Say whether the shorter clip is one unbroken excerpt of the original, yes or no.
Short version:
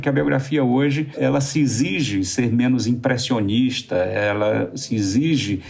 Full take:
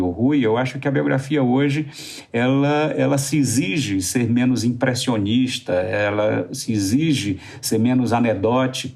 no